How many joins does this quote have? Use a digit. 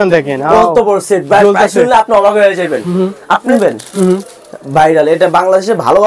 1